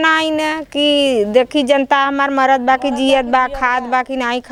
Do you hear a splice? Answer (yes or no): no